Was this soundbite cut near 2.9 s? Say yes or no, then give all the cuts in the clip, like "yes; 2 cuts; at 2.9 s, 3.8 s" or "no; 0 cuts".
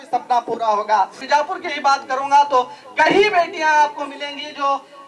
no; 1 cut; at 1.2 s